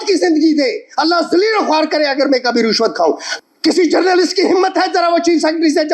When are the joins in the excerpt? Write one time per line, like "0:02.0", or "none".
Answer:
0:03.3